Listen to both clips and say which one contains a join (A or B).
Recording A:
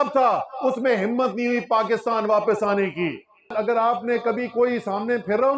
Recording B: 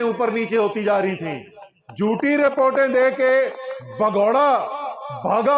A